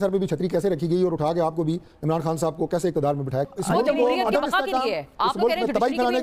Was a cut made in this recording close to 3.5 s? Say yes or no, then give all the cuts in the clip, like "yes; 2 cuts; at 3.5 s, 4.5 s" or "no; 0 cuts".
yes; 1 cut; at 3.5 s